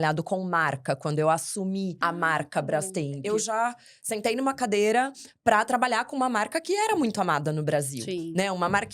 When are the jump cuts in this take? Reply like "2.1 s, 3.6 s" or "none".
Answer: 2.0 s, 3.2 s